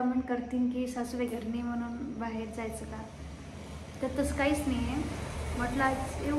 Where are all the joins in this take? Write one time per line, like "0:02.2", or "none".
none